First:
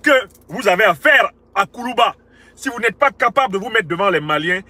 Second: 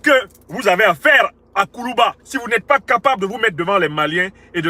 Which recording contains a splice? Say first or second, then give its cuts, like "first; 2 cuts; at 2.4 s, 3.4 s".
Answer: second; 1 cut; at 2.3 s